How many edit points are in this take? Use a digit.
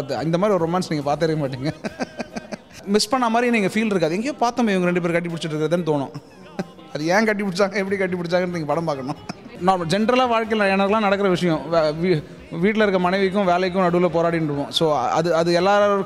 2